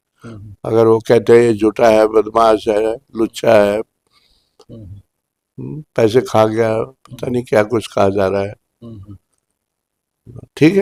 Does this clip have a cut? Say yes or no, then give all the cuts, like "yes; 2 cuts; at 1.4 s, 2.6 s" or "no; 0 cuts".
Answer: no; 0 cuts